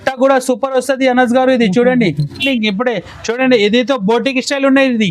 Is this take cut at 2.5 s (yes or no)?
yes